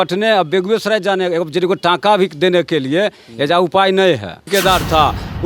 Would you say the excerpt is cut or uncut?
cut